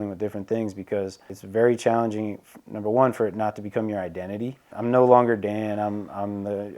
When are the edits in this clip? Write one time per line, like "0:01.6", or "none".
0:01.4
0:04.7